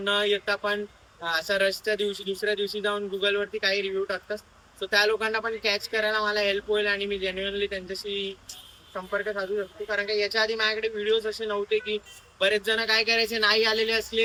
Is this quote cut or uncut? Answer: uncut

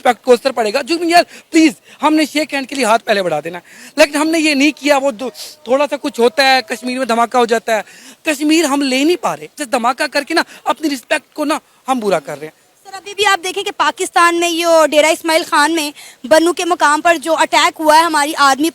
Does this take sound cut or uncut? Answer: uncut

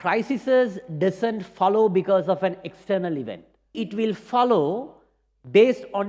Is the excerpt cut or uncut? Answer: cut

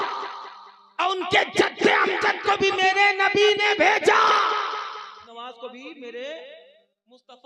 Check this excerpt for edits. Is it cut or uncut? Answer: cut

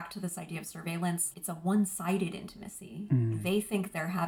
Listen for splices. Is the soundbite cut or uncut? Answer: cut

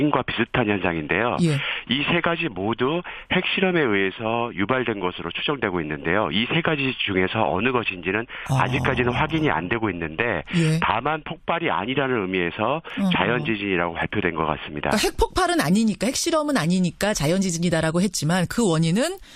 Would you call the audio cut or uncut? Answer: cut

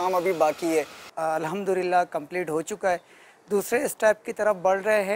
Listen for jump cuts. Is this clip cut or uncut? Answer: cut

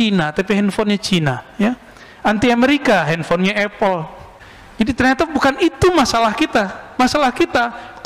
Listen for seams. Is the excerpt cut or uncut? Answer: uncut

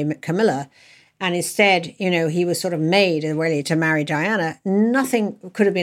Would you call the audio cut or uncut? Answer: uncut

